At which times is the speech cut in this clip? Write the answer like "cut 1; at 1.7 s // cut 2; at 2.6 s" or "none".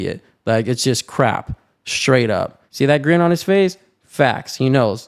cut 1; at 2.6 s